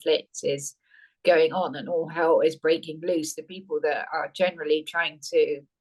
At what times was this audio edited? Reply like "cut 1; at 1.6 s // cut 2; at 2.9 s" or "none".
none